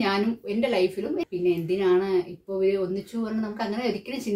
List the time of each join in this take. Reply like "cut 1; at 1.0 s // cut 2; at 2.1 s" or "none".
cut 1; at 1.2 s